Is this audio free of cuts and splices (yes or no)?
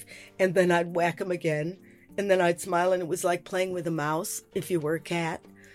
yes